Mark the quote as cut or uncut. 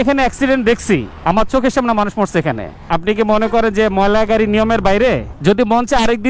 cut